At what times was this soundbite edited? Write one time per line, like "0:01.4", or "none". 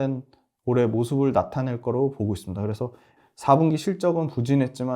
0:03.1